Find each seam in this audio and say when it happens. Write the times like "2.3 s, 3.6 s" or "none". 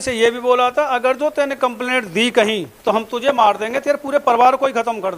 2.7 s